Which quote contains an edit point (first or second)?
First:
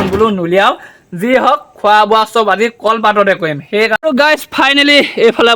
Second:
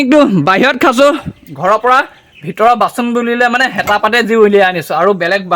first